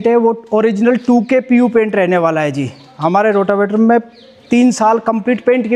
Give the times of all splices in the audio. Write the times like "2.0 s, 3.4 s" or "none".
none